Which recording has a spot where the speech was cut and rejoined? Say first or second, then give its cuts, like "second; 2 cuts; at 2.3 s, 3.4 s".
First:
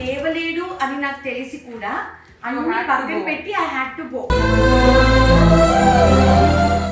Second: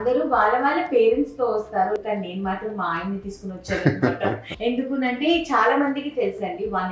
second; 2 cuts; at 2.0 s, 4.5 s